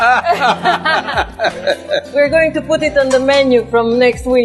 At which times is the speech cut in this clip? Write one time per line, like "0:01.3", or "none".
0:02.1